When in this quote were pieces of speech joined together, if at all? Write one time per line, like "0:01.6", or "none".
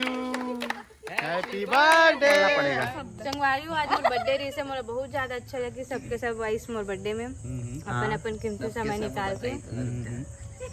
0:02.7